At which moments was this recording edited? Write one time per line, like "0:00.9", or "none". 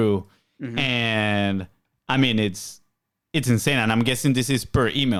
none